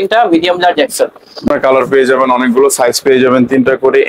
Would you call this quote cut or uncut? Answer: cut